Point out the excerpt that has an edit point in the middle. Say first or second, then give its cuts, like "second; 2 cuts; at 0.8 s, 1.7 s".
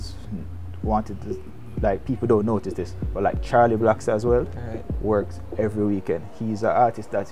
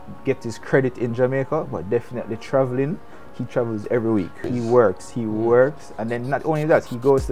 second; 1 cut; at 4.4 s